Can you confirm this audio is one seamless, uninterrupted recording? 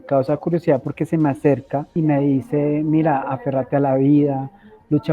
no; 1 cut; at 1.9 s

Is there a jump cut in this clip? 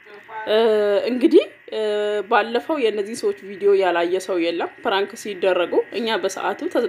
no; 0 cuts

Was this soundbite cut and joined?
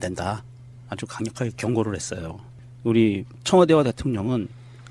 no; 0 cuts

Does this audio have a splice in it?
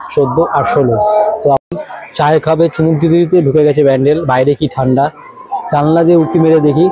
yes; 1 cut; at 1.7 s

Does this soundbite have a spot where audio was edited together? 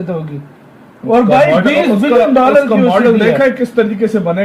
no; 0 cuts

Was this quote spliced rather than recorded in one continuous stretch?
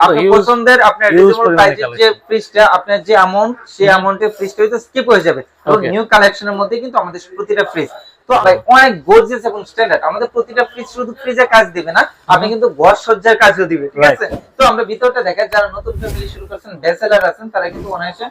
yes; 1 cut; at 8.4 s

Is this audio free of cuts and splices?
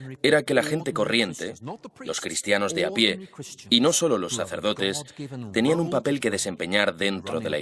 yes; 0 cuts

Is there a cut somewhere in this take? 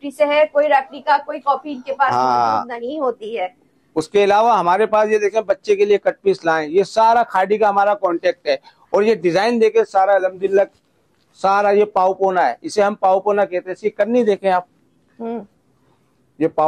no; 0 cuts

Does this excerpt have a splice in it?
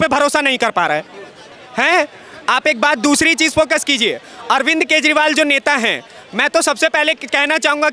yes; 1 cut; at 1.5 s

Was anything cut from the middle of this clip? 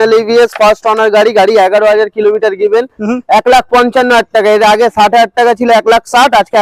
no; 0 cuts

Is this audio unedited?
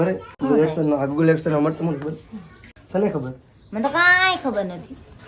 yes; 0 cuts

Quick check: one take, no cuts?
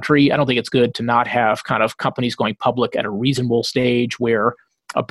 yes; 0 cuts

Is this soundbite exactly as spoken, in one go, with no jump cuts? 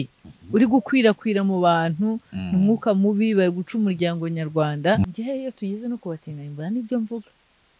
no; 1 cut; at 5.0 s

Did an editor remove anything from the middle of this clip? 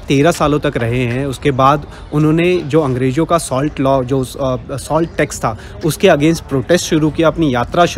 no; 0 cuts

